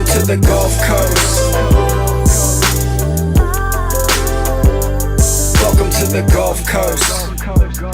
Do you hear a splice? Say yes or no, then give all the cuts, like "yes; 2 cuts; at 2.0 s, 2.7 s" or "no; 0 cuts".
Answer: no; 0 cuts